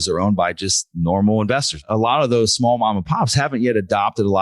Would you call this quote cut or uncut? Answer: cut